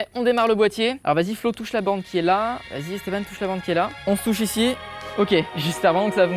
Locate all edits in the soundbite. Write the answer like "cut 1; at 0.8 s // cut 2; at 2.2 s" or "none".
cut 1; at 1.0 s // cut 2; at 2.7 s // cut 3; at 4.0 s // cut 4; at 5.5 s